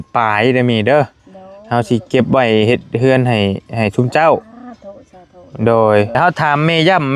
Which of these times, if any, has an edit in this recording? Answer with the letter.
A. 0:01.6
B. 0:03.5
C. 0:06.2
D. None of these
C